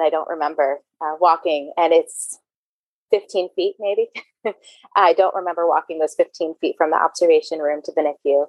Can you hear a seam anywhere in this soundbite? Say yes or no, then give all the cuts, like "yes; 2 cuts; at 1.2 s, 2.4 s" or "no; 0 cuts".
no; 0 cuts